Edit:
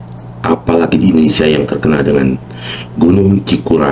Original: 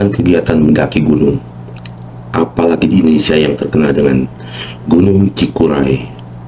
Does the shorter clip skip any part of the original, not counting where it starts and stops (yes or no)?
no